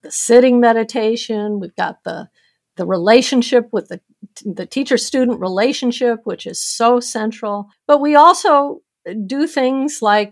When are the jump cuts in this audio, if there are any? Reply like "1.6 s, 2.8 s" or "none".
7.7 s